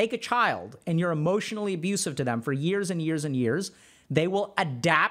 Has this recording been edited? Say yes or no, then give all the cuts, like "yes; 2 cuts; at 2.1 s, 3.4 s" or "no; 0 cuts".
no; 0 cuts